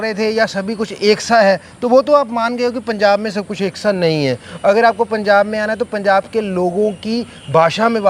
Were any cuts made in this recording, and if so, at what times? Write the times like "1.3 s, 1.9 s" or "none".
none